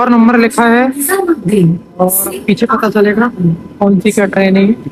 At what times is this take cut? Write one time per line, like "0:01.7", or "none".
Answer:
none